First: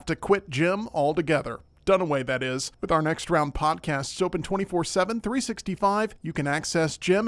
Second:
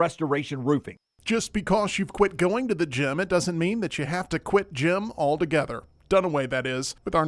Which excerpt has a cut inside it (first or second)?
second